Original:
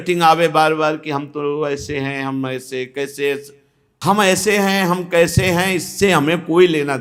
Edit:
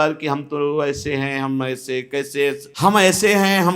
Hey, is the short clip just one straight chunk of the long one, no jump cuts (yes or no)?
no